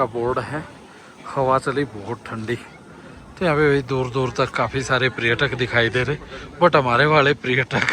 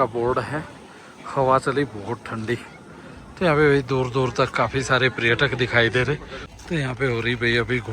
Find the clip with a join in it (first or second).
second